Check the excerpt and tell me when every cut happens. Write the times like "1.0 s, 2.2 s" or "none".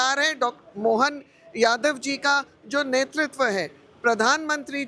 none